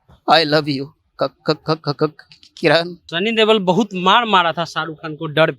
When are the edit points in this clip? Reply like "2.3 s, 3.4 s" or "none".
3.0 s